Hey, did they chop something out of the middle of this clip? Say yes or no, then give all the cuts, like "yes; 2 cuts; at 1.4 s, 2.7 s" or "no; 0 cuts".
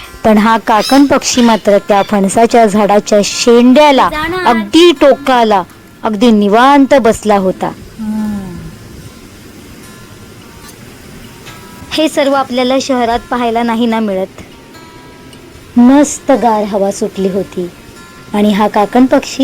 no; 0 cuts